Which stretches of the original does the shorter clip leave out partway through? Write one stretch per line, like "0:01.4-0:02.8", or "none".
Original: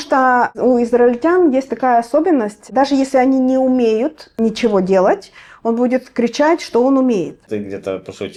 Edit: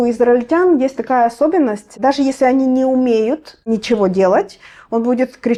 none

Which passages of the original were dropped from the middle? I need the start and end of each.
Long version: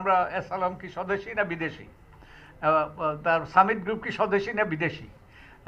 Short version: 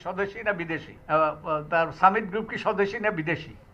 0:01.8-0:02.5

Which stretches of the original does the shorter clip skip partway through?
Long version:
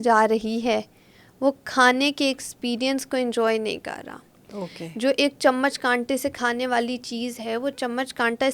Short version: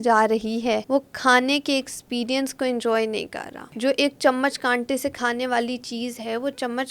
0:00.8-0:01.4
0:04.1-0:04.8

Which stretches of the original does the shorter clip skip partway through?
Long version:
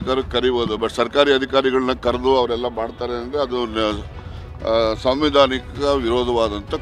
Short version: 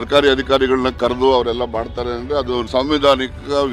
0:03.7-0:05.0

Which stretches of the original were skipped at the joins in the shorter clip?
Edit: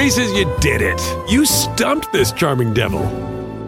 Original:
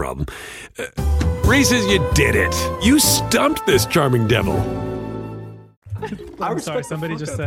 none

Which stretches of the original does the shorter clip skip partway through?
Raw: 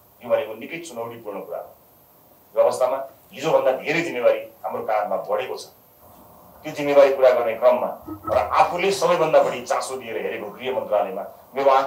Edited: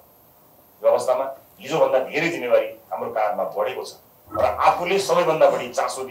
0:05.9-0:08.1

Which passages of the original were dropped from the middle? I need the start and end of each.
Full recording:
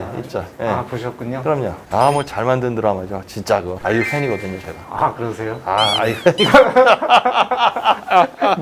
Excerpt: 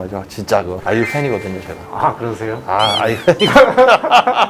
none

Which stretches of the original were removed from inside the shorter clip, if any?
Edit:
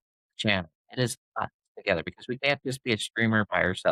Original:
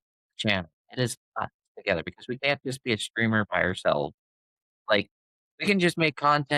none

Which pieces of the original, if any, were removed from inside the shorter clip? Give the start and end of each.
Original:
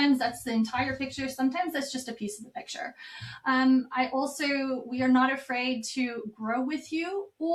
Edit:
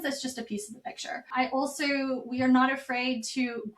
0:03.0-0:03.9

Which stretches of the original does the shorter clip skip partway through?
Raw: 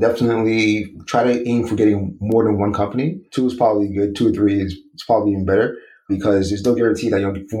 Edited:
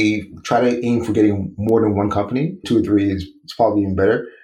0:03.3-0:04.1

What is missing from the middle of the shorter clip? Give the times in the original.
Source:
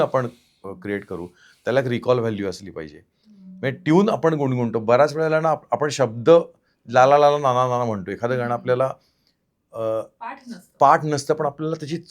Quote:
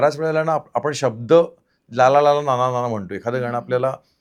none

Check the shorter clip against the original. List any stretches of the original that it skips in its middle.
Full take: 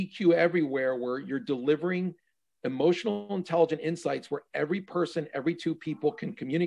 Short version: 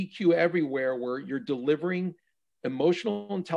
none

